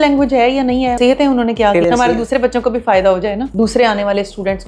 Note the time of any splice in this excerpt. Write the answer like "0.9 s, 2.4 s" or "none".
1.0 s, 3.5 s